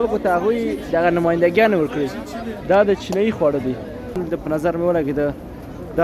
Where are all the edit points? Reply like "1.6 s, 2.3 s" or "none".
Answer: 4.2 s